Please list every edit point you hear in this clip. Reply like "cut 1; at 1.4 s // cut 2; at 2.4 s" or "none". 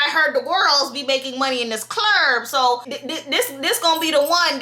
cut 1; at 3.0 s